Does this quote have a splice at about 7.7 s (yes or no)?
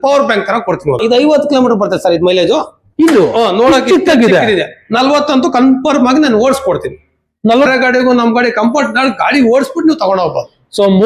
yes